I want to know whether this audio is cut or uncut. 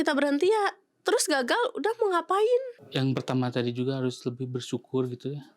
cut